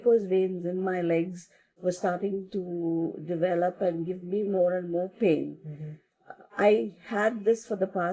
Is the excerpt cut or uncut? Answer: uncut